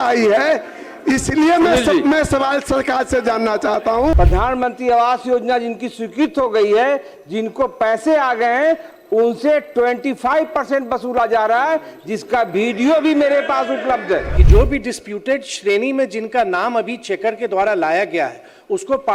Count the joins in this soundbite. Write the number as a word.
two